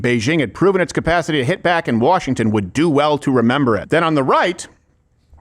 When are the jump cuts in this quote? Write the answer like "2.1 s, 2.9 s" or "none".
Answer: 3.8 s